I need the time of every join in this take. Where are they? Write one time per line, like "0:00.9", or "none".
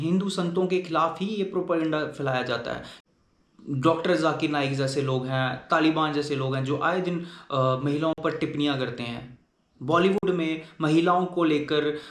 0:03.3